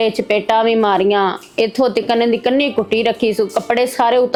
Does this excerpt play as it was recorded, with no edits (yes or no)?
yes